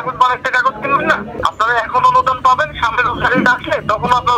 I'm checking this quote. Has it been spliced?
yes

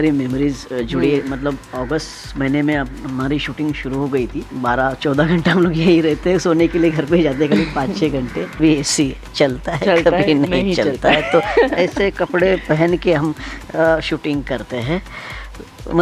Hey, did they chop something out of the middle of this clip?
yes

